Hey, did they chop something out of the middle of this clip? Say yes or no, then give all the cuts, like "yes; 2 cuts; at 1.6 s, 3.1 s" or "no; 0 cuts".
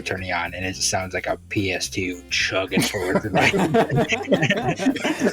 no; 0 cuts